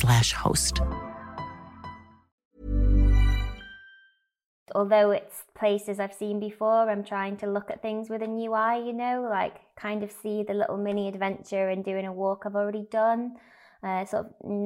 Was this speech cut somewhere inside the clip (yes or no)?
yes